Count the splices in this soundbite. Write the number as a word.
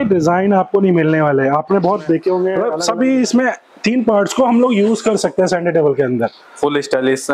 one